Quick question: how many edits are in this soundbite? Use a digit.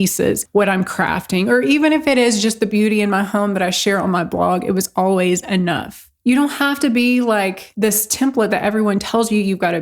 2